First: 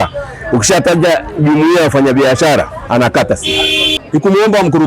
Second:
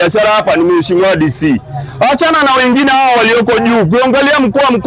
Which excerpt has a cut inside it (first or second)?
first